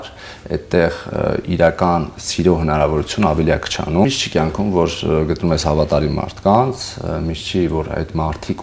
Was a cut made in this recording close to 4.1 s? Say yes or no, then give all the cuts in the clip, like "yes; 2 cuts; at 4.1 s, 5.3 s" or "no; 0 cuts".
yes; 1 cut; at 4.1 s